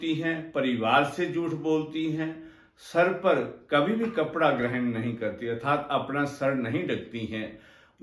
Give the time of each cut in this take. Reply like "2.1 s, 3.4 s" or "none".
none